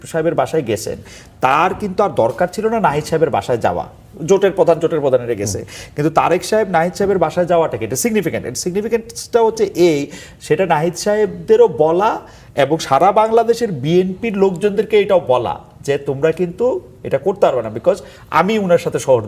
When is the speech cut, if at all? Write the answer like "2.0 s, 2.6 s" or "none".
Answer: none

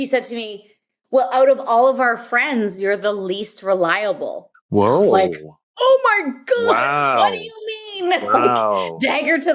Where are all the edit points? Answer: none

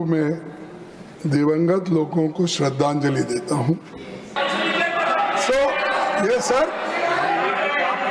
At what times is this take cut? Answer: 4.4 s

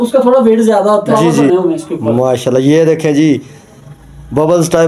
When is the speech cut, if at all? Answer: 1.5 s

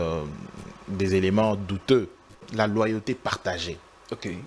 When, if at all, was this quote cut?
2.4 s

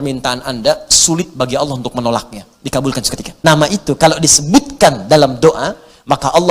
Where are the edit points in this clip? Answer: 3.2 s

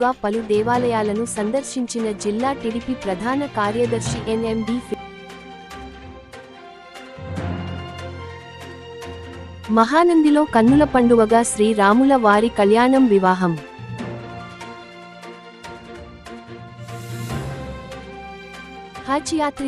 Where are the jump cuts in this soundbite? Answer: none

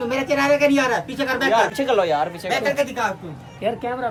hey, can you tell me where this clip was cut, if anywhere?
none

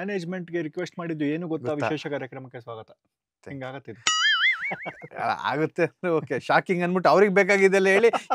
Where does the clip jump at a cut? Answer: none

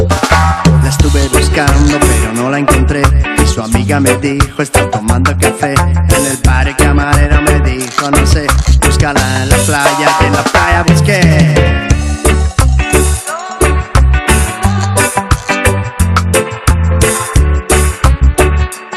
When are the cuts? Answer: 4.0 s

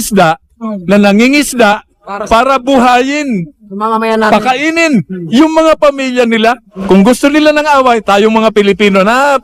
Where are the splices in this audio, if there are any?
6.7 s

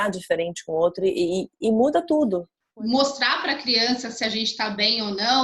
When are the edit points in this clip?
2.6 s

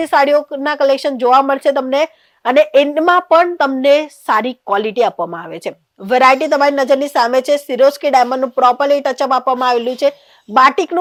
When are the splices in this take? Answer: none

